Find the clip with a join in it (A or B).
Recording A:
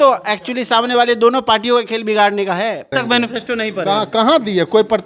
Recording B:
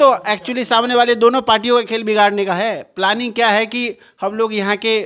A